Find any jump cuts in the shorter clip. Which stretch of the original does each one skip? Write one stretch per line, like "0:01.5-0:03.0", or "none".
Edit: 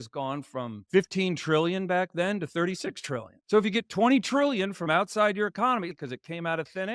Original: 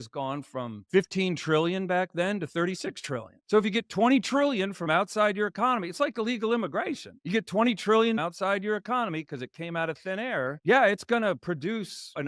0:05.9-0:09.2